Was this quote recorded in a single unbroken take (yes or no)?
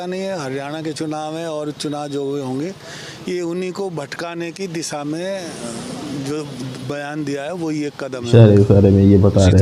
yes